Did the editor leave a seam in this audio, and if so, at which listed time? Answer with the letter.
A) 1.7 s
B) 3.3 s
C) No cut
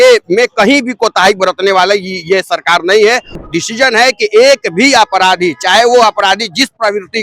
B